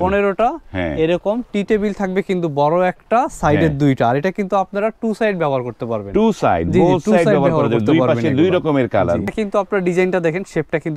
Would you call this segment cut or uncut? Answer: cut